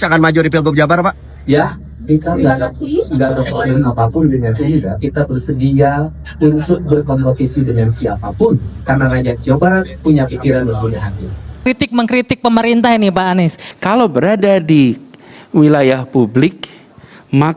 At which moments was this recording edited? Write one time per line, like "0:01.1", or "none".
0:11.7
0:13.6

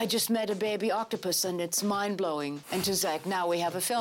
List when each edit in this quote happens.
0:02.6

